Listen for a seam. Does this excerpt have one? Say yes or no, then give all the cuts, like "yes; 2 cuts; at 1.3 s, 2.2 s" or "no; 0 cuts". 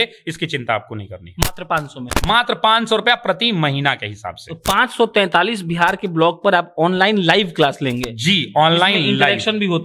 no; 0 cuts